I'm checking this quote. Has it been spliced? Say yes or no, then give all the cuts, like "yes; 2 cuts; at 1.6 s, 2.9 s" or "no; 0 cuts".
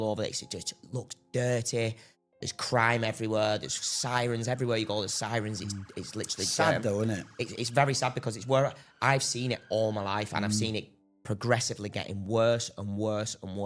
no; 0 cuts